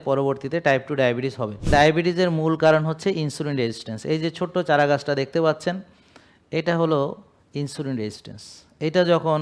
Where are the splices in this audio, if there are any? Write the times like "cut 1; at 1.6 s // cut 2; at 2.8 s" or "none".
cut 1; at 1.7 s